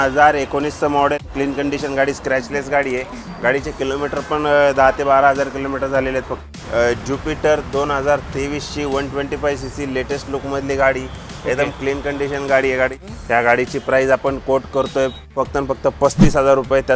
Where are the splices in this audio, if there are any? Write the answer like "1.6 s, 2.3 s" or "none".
1.2 s, 6.5 s, 13.1 s, 15.3 s